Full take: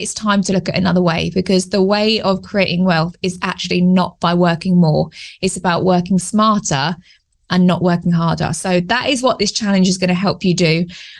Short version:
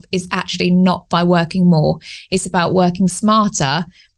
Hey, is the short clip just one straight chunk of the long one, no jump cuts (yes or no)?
yes